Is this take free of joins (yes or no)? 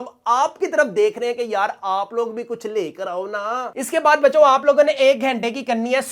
yes